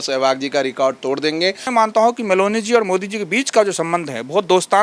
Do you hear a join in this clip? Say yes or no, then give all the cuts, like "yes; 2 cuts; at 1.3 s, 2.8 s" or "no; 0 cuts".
yes; 1 cut; at 1.6 s